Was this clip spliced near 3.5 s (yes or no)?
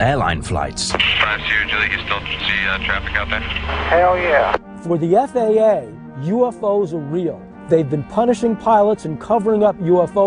yes